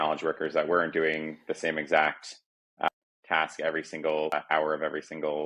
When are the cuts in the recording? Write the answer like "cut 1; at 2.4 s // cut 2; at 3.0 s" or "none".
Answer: cut 1; at 2.9 s // cut 2; at 4.3 s

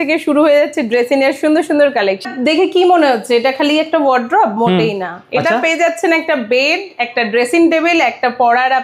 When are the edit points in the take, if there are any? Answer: cut 1; at 2.2 s

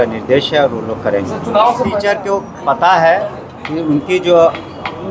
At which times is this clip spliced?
cut 1; at 1.9 s

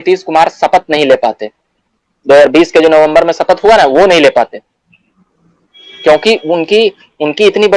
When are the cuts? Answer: none

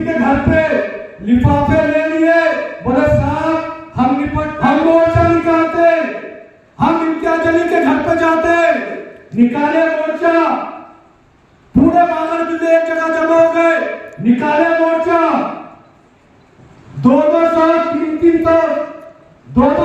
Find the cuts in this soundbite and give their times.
cut 1; at 4.5 s

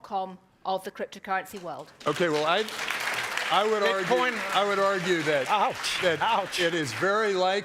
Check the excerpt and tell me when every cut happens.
none

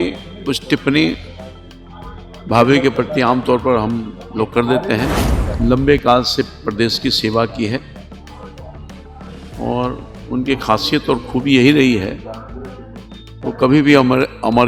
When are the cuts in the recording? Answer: cut 1; at 5.4 s

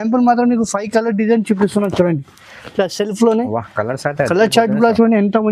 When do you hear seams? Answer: none

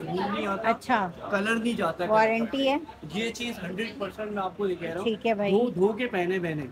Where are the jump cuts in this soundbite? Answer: none

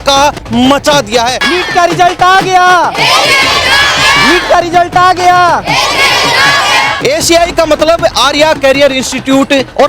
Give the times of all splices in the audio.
cut 1; at 1.4 s // cut 2; at 6.9 s

